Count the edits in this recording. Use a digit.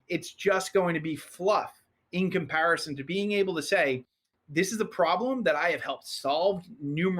1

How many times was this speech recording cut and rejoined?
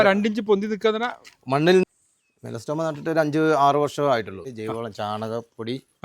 2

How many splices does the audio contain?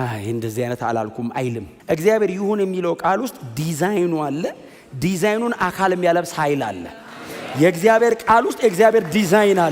1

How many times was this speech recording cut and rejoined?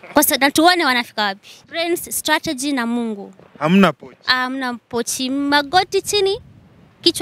1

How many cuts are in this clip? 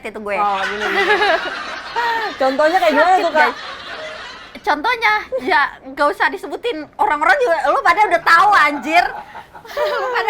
0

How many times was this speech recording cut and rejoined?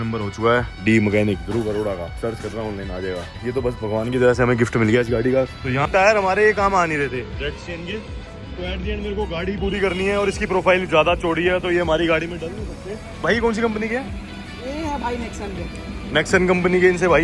2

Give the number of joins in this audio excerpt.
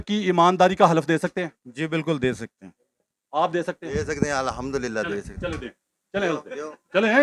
0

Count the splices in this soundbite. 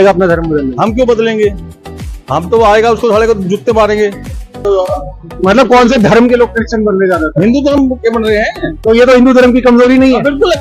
1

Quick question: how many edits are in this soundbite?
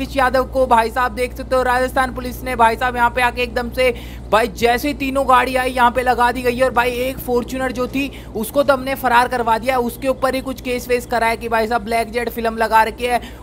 0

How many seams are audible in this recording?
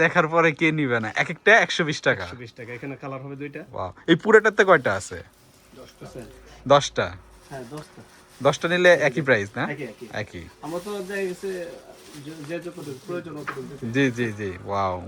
0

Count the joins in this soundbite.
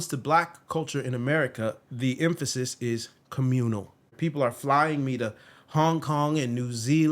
2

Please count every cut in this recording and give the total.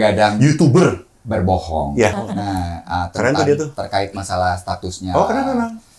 1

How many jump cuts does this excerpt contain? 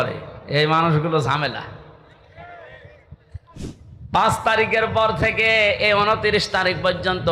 1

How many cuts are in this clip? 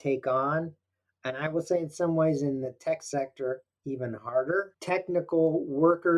1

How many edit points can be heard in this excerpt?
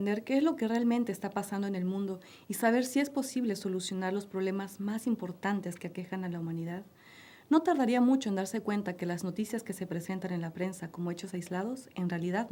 0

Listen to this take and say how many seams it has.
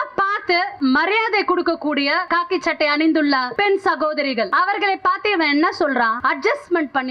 5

